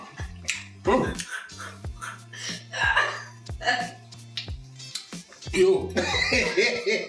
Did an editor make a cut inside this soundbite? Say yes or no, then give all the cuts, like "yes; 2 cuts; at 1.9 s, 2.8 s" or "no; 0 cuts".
no; 0 cuts